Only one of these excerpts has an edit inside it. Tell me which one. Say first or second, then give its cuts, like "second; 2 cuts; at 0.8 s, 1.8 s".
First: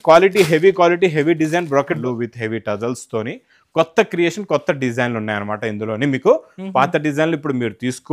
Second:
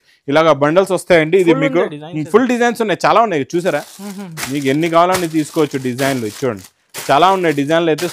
first; 1 cut; at 2.0 s